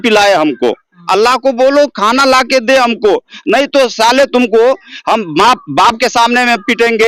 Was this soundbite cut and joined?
no; 0 cuts

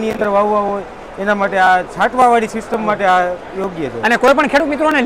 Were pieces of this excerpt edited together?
no; 0 cuts

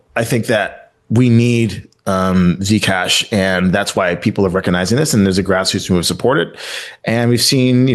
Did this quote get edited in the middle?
no; 0 cuts

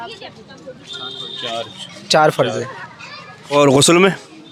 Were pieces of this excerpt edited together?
no; 0 cuts

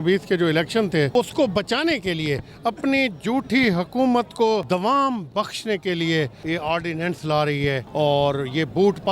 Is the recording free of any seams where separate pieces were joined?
no; 4 cuts; at 1.1 s, 4.6 s, 6.4 s, 7.8 s

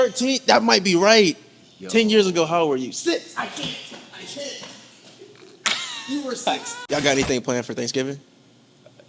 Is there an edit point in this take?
yes; 1 cut; at 6.7 s

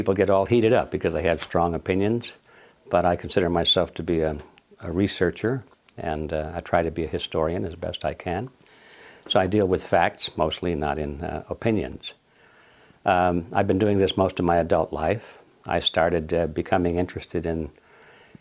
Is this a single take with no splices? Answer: yes; 0 cuts

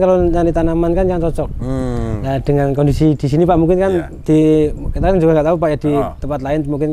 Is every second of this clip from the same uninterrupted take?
yes; 0 cuts

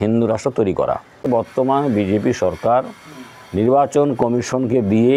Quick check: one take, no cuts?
no; 1 cut; at 1.3 s

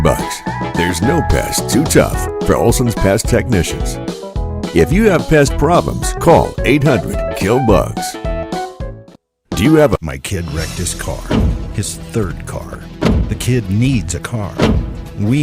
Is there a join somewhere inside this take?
yes; 1 cut; at 10.0 s

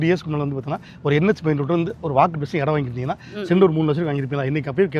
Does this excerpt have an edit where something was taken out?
no; 0 cuts

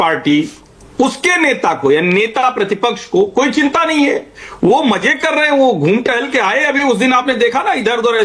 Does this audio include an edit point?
no; 0 cuts

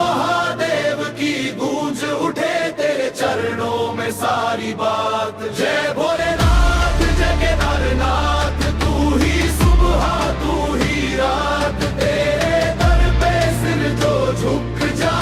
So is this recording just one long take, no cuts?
yes; 0 cuts

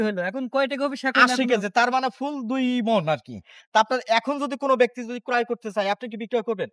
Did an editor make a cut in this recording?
yes; 1 cut; at 3.5 s

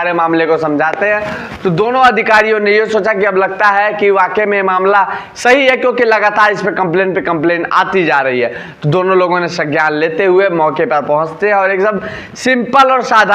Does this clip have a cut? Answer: no; 0 cuts

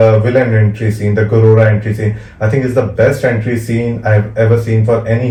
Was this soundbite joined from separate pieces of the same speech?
no; 0 cuts

